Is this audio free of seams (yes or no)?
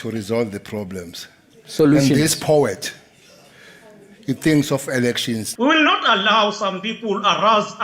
no